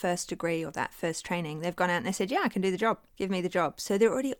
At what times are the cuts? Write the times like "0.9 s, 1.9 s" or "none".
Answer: 3.1 s